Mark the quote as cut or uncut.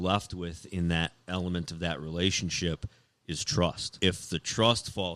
cut